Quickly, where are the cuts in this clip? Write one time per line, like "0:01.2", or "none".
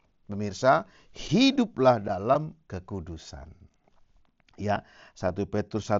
none